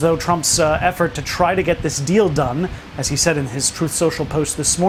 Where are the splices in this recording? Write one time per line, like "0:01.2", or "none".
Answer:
none